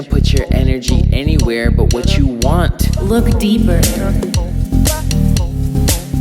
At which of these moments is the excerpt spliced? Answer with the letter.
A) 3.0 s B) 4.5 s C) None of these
A